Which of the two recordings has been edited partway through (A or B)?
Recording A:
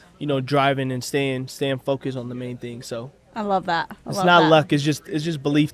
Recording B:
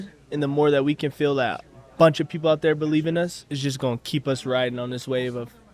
B